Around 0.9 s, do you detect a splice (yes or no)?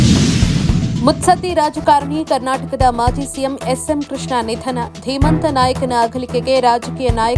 yes